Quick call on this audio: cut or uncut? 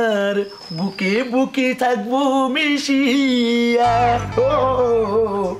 uncut